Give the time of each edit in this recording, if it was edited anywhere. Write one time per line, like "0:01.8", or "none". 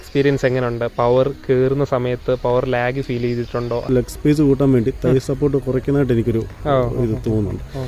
0:03.8